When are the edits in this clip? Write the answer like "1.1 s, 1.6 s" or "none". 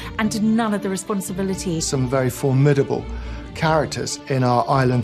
1.9 s